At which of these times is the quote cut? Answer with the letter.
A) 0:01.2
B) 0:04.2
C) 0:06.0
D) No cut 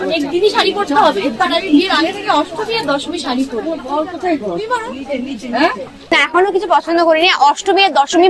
C